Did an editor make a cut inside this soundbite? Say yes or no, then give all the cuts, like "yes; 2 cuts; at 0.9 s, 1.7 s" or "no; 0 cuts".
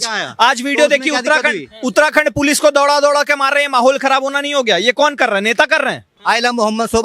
yes; 1 cut; at 6.1 s